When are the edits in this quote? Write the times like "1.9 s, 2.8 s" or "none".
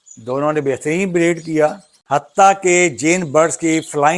1.9 s